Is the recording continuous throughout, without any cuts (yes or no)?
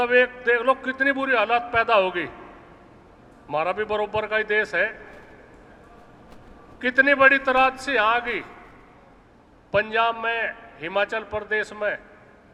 yes